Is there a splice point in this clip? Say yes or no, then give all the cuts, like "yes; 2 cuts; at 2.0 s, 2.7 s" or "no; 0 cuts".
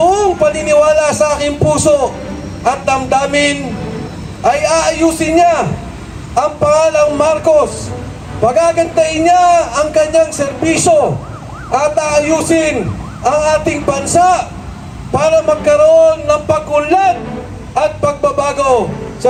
no; 0 cuts